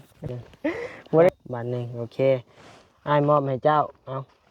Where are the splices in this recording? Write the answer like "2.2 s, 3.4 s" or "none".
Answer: 1.3 s